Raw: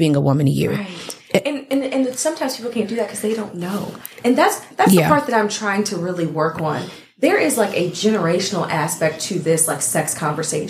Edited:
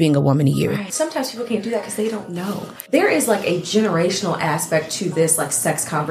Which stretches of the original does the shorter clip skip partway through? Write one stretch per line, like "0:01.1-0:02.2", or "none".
0:00.9-0:02.2
0:04.0-0:07.0